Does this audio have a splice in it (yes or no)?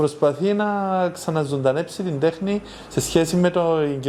no